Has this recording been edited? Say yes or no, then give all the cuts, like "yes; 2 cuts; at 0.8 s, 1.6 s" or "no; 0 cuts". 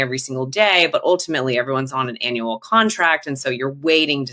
no; 0 cuts